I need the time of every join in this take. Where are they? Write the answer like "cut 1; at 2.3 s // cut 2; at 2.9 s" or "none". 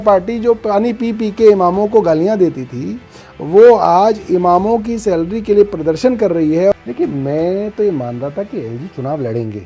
cut 1; at 6.7 s